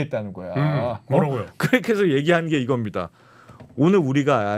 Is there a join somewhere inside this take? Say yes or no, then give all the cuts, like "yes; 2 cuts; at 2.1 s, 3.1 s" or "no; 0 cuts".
no; 0 cuts